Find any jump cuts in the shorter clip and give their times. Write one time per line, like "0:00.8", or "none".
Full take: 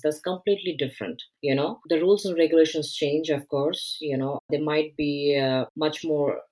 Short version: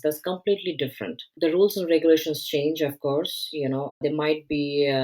0:01.3